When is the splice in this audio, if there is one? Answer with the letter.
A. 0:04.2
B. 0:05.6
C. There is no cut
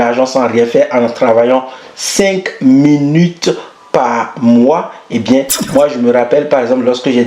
B